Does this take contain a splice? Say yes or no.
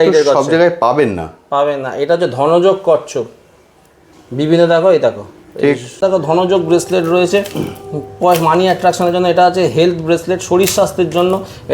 yes